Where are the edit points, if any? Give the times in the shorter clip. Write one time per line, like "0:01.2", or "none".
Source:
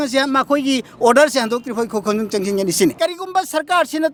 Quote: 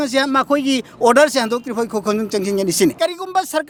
none